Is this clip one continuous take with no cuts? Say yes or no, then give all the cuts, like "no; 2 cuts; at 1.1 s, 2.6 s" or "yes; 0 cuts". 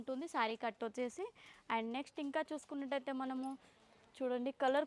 yes; 0 cuts